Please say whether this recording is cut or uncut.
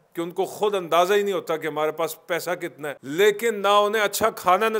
cut